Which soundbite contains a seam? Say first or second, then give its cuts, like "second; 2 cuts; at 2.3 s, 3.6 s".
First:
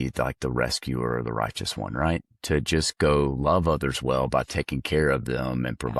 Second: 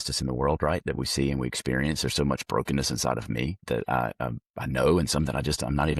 second; 1 cut; at 3.6 s